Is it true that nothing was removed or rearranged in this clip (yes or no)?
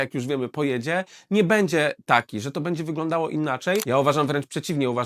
no